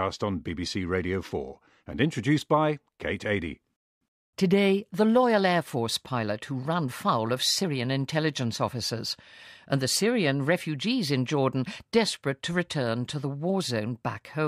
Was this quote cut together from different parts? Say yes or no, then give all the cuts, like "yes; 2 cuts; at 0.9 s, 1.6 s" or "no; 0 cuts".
no; 0 cuts